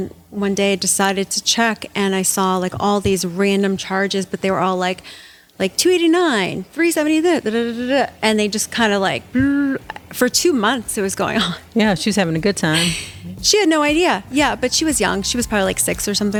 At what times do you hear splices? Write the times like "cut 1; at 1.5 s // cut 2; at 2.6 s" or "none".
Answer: none